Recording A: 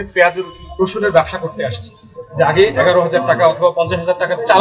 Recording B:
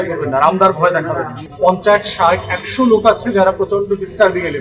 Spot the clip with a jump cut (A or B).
B